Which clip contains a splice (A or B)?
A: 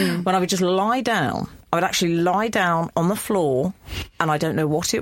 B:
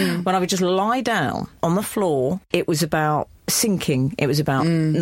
B